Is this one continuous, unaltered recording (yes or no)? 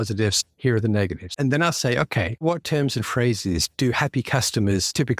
no